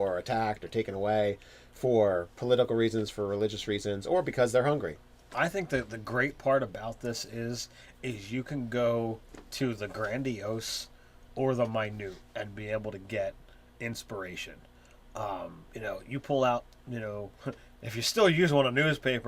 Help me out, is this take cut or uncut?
cut